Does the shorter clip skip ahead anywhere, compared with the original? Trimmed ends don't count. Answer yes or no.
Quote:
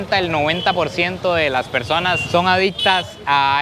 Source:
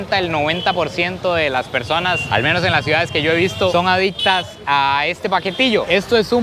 yes